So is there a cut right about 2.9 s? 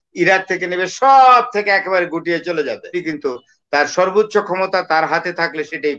yes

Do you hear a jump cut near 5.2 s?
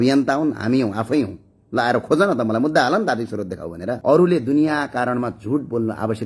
no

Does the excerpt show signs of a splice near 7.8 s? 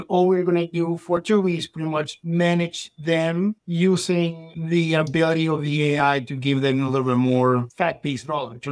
no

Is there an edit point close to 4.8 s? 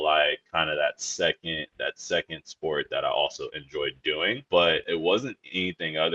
yes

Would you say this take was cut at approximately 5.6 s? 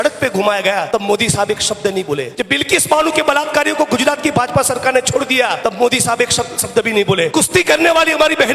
yes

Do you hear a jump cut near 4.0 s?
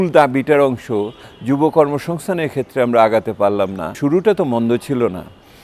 yes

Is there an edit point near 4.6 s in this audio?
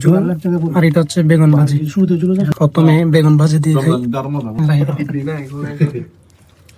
yes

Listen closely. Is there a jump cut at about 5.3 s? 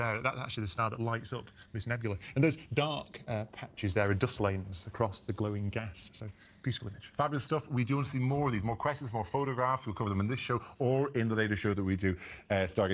yes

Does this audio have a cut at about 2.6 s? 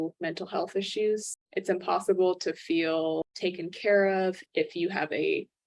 no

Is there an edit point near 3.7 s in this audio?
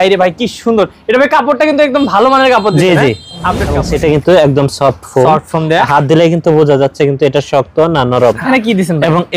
yes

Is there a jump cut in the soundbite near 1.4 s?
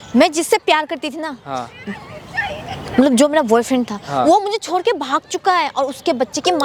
no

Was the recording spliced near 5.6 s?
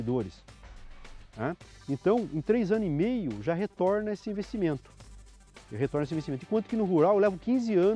no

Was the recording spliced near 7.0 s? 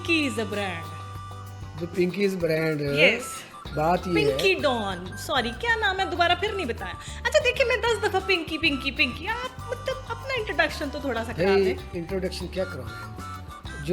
no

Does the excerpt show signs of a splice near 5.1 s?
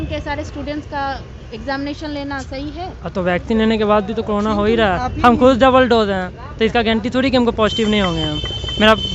no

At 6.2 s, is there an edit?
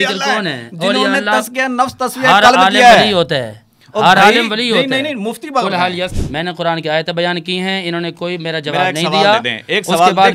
yes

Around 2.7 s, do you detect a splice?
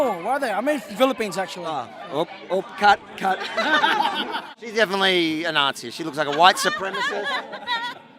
no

